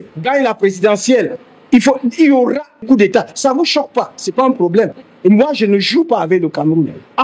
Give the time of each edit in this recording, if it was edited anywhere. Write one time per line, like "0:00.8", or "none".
0:02.8
0:05.1